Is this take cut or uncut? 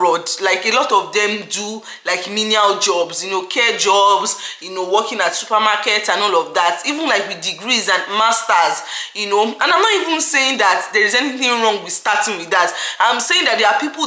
uncut